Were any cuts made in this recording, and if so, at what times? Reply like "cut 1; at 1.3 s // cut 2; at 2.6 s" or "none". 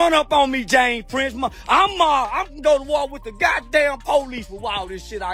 none